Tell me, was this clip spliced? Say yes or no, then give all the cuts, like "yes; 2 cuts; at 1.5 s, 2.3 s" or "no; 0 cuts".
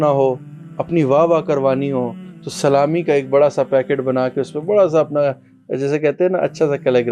no; 0 cuts